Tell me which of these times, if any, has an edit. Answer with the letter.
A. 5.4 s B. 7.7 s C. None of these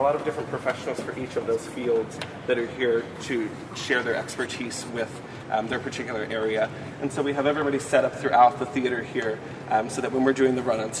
C